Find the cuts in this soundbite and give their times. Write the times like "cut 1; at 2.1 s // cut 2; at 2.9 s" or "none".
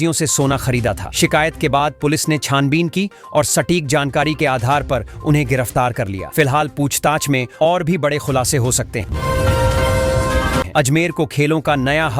cut 1; at 9.1 s // cut 2; at 10.7 s

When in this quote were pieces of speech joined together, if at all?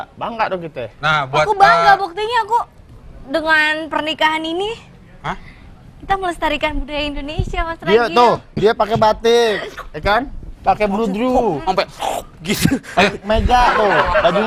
none

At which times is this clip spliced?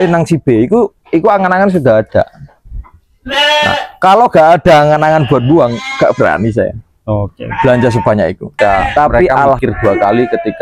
cut 1; at 9.6 s

